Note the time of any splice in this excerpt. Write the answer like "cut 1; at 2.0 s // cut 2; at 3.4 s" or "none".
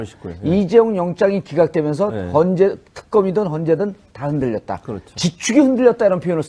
cut 1; at 5.1 s